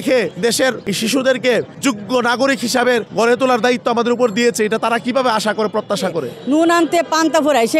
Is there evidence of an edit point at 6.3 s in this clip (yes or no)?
yes